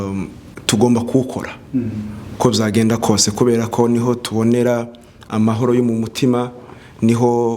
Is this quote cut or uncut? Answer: uncut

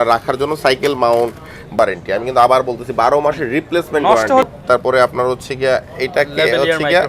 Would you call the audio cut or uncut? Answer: cut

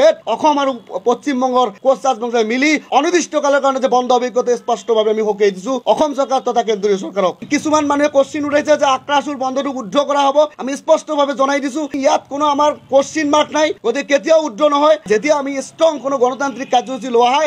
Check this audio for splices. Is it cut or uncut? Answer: cut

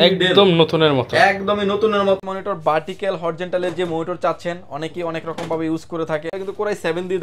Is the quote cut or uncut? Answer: cut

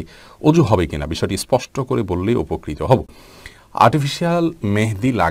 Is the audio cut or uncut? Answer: uncut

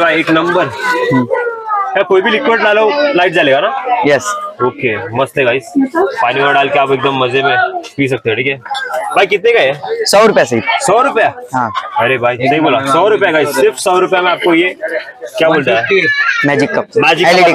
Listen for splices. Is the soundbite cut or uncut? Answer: uncut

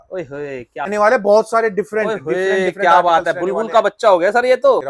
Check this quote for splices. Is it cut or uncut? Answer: uncut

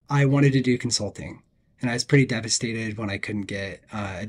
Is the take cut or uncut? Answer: uncut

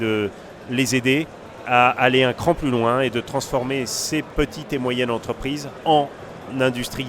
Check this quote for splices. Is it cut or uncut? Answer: cut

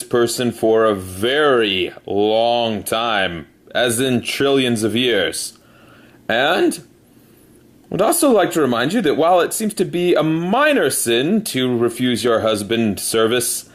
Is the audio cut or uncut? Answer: uncut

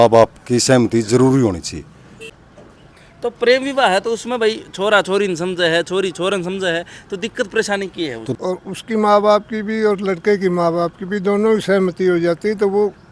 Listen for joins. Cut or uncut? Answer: cut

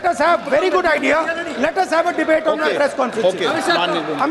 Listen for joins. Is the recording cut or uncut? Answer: uncut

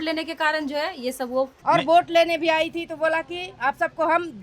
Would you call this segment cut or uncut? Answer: cut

